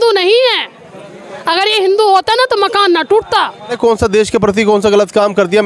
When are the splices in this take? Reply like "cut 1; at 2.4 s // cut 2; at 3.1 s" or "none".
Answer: cut 1; at 3.8 s